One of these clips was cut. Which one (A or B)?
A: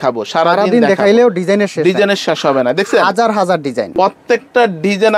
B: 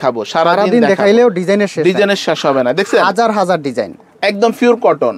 A